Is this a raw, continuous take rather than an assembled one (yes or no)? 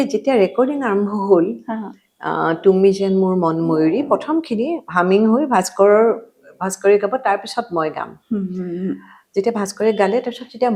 yes